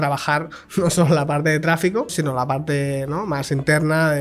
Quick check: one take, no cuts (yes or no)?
no